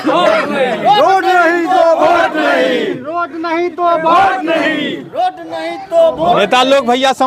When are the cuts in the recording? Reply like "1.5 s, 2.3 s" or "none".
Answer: none